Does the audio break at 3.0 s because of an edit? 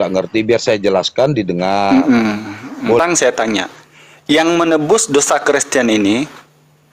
yes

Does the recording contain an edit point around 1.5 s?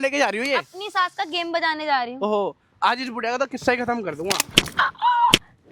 no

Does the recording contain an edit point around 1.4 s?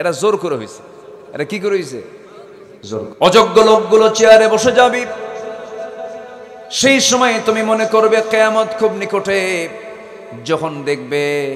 no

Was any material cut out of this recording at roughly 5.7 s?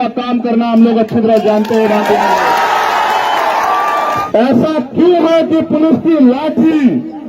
no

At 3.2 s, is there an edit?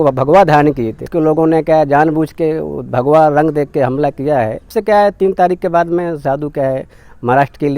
no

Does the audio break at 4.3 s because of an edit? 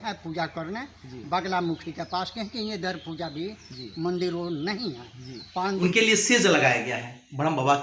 no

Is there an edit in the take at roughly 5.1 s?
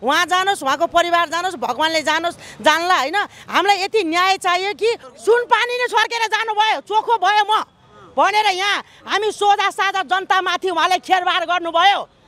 yes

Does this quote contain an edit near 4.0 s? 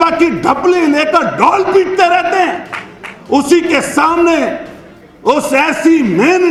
no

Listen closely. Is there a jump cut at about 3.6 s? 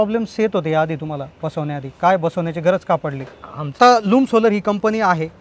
yes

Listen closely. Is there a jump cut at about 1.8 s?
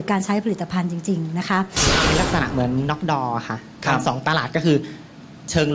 yes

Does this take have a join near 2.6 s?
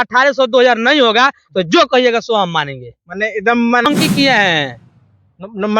no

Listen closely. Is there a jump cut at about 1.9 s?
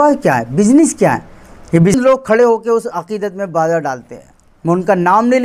yes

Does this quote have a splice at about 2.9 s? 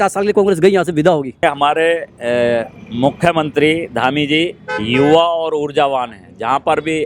no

